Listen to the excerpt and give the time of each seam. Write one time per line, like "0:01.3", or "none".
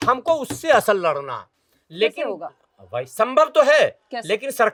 none